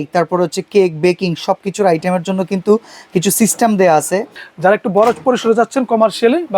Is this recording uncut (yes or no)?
no